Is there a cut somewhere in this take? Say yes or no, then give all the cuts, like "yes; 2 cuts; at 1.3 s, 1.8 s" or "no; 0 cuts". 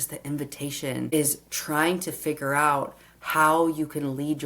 yes; 1 cut; at 1.1 s